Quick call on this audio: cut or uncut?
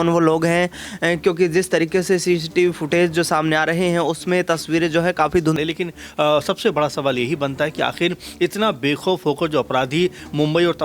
cut